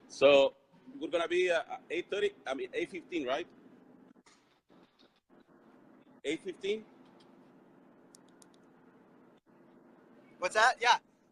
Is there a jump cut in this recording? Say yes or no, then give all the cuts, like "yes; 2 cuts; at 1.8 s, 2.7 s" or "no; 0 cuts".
no; 0 cuts